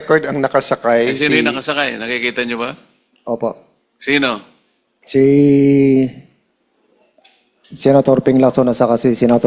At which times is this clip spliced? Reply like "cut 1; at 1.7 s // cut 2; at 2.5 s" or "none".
none

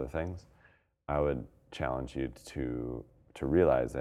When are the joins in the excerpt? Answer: cut 1; at 1.6 s // cut 2; at 3.2 s

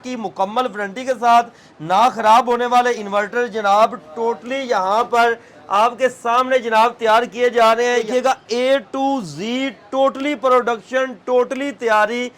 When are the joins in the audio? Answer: cut 1; at 8.0 s

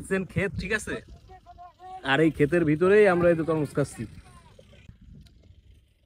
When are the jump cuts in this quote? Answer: cut 1; at 4.9 s

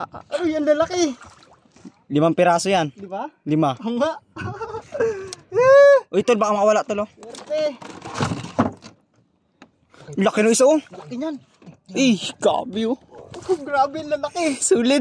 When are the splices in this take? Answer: none

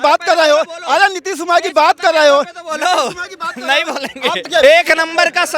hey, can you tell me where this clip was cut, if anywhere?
cut 1; at 4.5 s

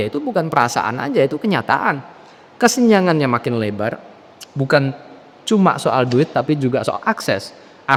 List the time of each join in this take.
none

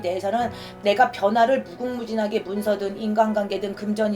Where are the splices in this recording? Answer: none

